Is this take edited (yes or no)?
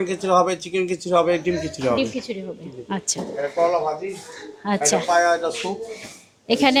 no